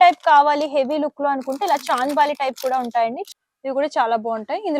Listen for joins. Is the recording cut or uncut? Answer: cut